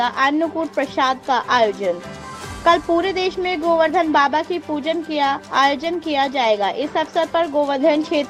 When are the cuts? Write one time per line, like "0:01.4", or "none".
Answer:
none